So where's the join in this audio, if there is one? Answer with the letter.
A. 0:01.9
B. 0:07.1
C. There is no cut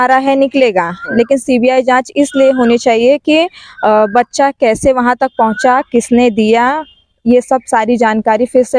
C